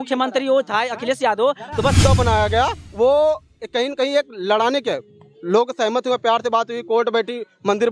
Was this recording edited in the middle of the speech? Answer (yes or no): yes